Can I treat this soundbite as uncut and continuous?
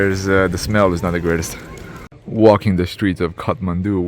no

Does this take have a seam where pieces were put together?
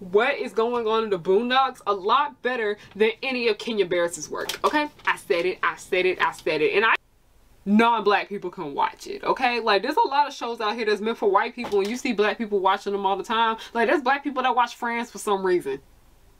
yes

